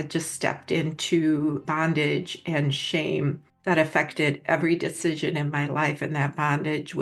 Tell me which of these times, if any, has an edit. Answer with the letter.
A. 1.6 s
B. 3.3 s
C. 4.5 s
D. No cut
A